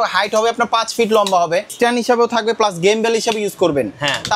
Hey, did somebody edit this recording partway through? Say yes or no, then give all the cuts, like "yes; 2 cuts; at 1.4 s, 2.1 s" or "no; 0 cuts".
yes; 1 cut; at 1.7 s